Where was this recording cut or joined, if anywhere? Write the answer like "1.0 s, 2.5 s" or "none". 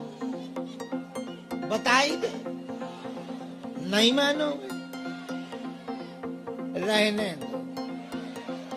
none